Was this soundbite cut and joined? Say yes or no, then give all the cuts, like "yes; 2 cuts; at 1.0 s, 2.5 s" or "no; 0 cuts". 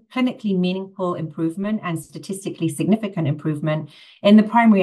no; 0 cuts